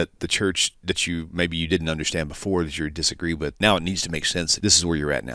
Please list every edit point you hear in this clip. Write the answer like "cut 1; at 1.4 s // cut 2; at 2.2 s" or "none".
cut 1; at 3.6 s // cut 2; at 4.5 s

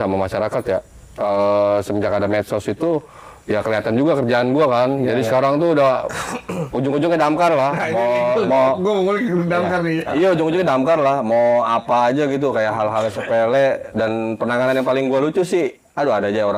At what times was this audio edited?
none

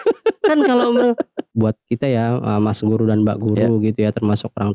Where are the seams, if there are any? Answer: cut 1; at 1.4 s

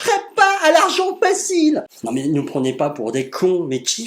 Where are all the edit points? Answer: cut 1; at 1.9 s

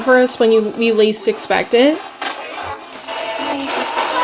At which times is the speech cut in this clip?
cut 1; at 3.0 s

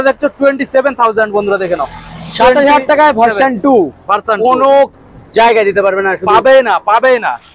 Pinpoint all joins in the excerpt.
none

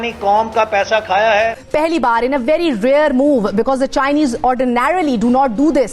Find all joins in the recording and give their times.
cut 1; at 1.6 s

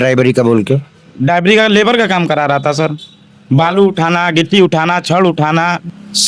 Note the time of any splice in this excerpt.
none

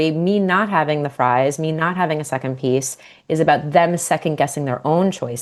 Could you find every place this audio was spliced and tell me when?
none

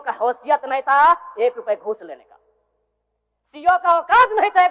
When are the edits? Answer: none

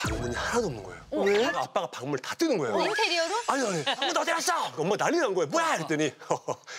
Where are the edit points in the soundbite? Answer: cut 1; at 1.6 s // cut 2; at 2.9 s // cut 3; at 4.1 s

